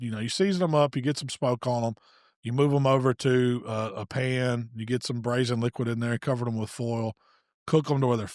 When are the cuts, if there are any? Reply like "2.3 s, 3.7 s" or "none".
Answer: none